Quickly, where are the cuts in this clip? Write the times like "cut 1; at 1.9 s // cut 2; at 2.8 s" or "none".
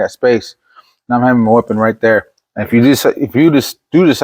none